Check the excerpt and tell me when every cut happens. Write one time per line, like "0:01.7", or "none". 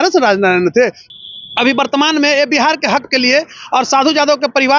0:01.0